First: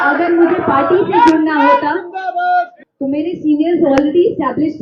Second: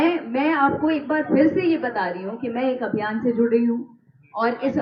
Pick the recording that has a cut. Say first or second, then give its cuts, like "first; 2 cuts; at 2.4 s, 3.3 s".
first; 1 cut; at 2.8 s